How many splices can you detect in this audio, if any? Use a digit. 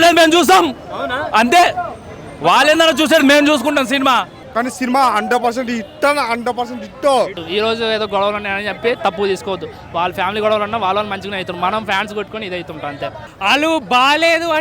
2